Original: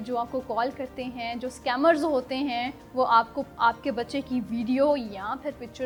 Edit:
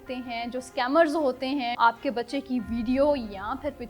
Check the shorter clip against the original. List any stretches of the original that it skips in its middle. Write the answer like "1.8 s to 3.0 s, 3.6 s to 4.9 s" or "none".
2.6 s to 3.5 s